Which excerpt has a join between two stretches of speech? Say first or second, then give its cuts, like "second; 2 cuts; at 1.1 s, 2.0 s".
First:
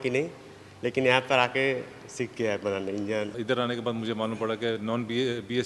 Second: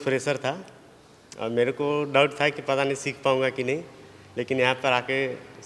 first; 1 cut; at 3.3 s